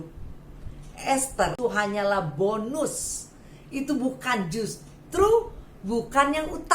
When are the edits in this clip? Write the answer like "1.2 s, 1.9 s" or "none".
1.5 s